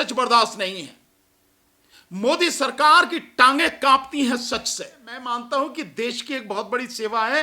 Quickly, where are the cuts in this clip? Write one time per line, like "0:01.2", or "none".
0:05.2